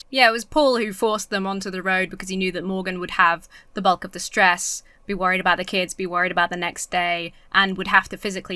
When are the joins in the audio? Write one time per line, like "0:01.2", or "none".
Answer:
none